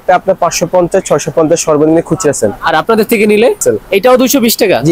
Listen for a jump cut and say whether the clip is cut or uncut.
cut